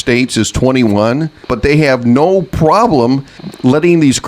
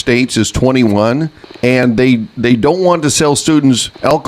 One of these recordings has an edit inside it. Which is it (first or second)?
first